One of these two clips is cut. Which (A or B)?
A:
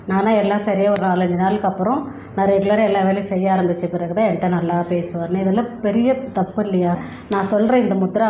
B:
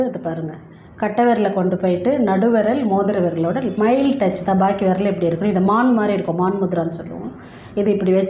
A